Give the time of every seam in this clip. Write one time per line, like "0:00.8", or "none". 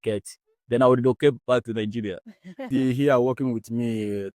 0:02.7